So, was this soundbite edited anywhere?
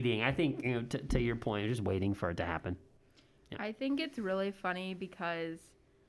no; 0 cuts

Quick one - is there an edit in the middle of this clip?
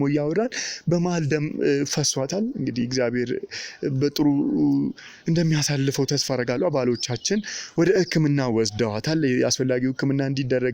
no; 0 cuts

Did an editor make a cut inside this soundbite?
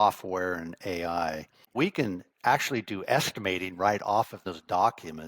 yes; 2 cuts; at 1.7 s, 4.5 s

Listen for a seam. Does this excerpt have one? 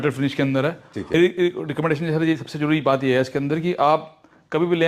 yes; 1 cut; at 1.1 s

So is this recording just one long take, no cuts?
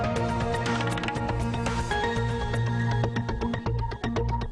yes; 0 cuts

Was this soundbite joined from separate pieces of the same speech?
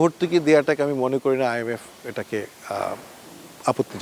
no; 0 cuts

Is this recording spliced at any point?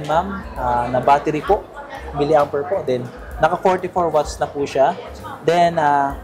no; 0 cuts

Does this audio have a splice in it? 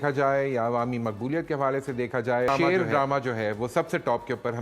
yes; 1 cut; at 2.5 s

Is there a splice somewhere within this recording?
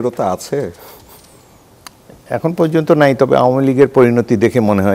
no; 0 cuts

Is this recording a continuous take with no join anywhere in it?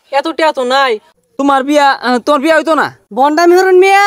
no; 2 cuts; at 1.1 s, 3.0 s

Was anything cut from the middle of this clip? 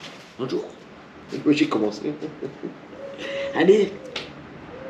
yes; 1 cut; at 1.1 s

